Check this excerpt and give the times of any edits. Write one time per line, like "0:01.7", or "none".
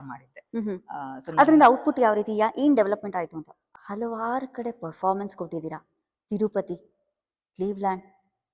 0:03.6